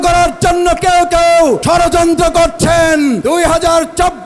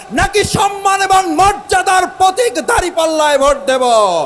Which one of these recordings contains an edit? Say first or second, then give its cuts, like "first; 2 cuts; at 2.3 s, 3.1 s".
first; 2 cuts; at 1.6 s, 3.2 s